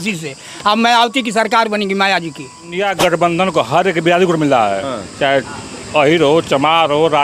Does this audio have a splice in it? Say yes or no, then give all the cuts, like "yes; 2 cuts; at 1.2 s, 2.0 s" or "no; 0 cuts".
yes; 1 cut; at 2.8 s